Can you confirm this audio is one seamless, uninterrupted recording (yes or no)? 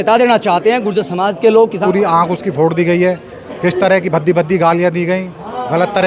no